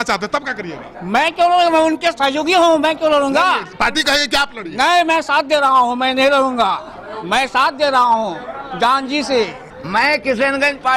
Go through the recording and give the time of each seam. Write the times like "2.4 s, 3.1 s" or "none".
9.6 s